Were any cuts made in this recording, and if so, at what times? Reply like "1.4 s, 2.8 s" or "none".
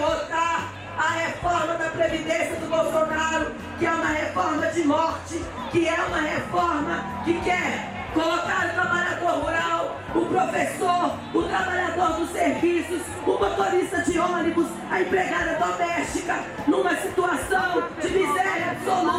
none

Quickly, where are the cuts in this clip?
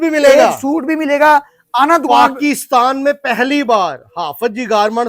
none

